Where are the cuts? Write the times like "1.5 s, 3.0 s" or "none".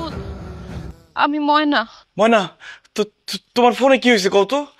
1.0 s, 2.0 s